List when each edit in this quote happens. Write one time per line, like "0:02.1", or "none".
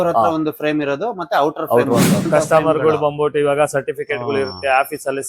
0:02.3